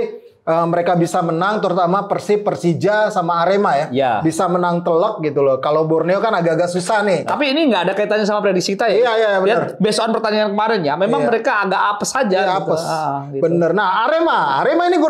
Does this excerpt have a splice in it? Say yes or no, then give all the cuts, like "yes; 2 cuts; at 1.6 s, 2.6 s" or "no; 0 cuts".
yes; 1 cut; at 7.3 s